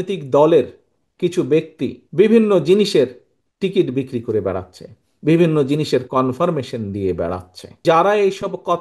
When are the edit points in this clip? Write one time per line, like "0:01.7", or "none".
0:02.0
0:07.8